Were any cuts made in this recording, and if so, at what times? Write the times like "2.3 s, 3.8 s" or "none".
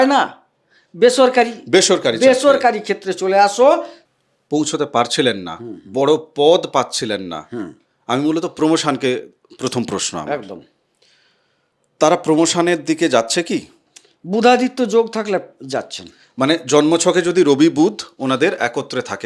3.9 s